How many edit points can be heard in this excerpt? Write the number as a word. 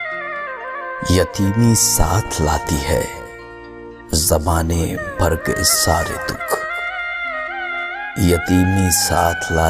one